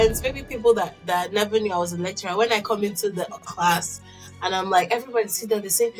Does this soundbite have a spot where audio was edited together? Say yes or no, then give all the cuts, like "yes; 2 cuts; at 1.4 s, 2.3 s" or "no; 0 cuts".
no; 0 cuts